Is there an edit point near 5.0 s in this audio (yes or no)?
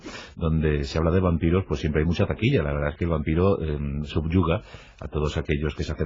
no